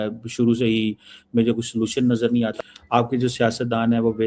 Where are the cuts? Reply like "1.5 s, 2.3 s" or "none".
2.6 s